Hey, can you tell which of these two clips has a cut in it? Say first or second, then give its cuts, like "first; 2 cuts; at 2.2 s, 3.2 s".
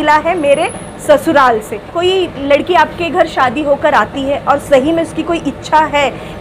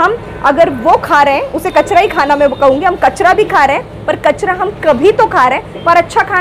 first; 1 cut; at 1.9 s